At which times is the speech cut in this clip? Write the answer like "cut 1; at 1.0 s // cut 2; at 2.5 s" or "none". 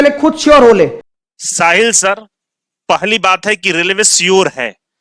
none